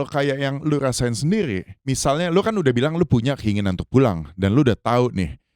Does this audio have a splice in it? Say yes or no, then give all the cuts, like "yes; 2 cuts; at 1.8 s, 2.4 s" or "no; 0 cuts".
yes; 1 cut; at 1.7 s